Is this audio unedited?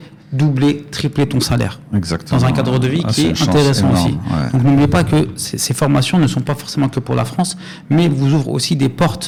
yes; 0 cuts

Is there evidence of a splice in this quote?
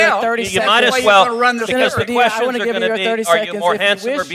no; 0 cuts

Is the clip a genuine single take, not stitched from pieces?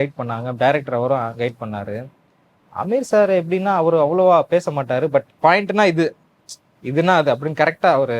no; 1 cut; at 5.3 s

